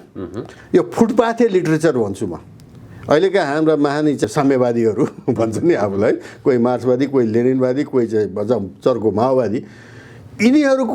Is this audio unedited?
no; 1 cut; at 4.2 s

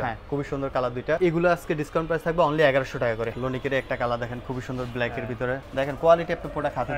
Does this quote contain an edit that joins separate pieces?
yes; 3 cuts; at 1.2 s, 3.3 s, 5.7 s

